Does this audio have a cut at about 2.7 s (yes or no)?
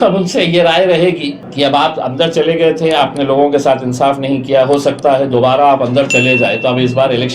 no